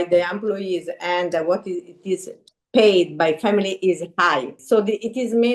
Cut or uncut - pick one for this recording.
cut